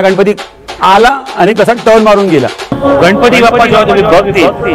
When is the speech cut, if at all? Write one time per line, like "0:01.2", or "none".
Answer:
0:02.7